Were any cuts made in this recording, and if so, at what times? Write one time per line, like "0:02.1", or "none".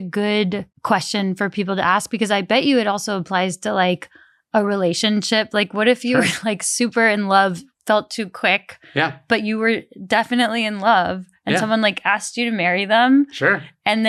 none